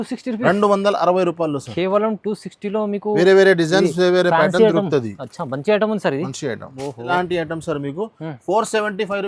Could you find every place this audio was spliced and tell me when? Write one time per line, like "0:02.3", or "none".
0:07.1